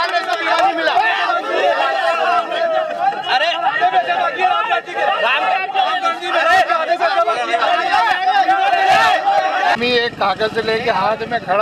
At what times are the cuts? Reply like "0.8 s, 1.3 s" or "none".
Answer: 9.8 s